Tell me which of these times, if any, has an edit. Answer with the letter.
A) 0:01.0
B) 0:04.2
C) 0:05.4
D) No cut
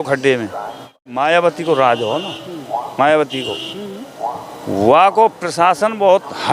A